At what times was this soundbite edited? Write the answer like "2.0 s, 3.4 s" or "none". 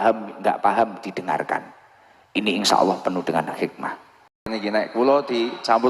4.5 s